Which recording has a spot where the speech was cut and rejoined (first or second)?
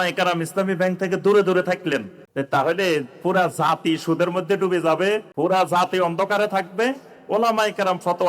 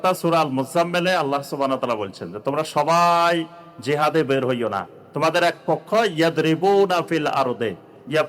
first